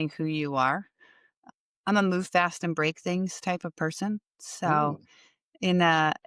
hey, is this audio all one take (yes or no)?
no